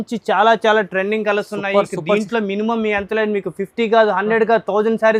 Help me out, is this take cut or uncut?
uncut